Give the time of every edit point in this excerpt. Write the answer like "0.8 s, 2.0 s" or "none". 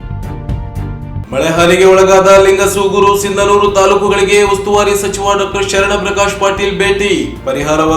0.9 s